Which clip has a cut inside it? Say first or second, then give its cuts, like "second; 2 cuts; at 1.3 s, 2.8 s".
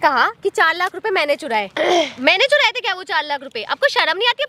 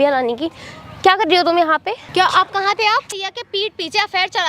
second; 2 cuts; at 2.0 s, 3.3 s